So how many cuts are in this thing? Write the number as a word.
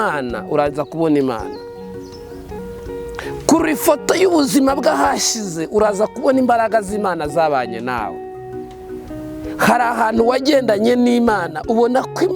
zero